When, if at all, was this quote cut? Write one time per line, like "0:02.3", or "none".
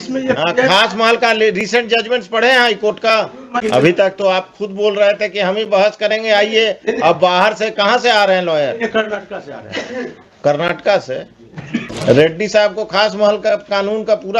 0:03.6
0:11.9